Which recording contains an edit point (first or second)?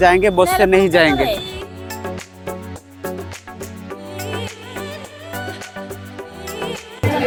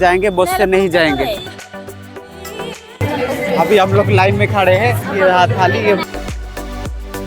second